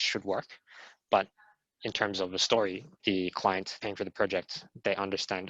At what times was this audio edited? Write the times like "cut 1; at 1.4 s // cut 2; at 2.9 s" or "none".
cut 1; at 2.9 s // cut 2; at 3.7 s

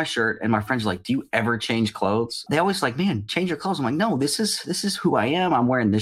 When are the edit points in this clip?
cut 1; at 2.4 s

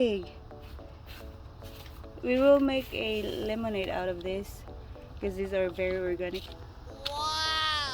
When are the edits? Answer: cut 1; at 6.9 s

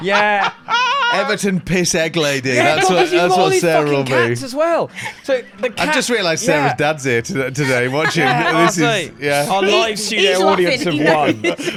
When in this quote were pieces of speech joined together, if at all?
none

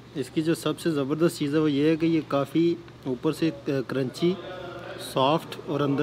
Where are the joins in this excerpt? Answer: none

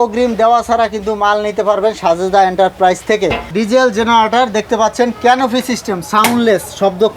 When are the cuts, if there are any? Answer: cut 1; at 3.5 s

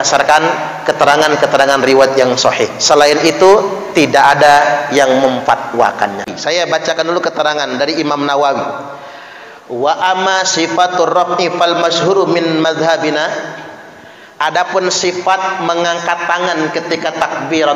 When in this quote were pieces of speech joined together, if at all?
cut 1; at 6.3 s

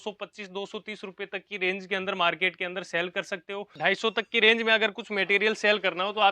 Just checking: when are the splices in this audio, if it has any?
cut 1; at 3.7 s

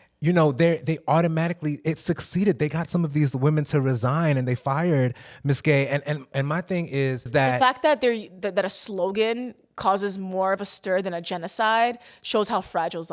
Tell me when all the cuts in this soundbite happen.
cut 1; at 7.3 s

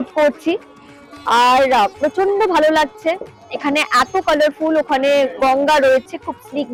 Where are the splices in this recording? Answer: none

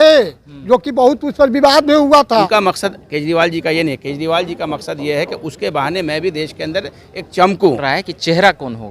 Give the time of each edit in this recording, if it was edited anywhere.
cut 1; at 2.5 s // cut 2; at 7.8 s

